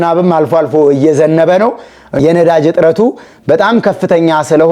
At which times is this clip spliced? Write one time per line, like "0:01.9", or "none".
0:02.1